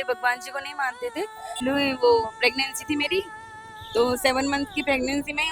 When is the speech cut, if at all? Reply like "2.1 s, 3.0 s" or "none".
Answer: 1.6 s